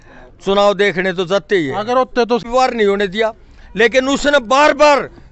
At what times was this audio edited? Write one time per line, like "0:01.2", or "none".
0:02.4